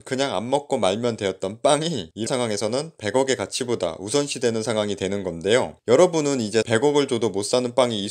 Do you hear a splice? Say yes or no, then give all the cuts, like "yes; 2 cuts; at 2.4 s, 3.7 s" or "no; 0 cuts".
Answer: yes; 2 cuts; at 2.3 s, 6.7 s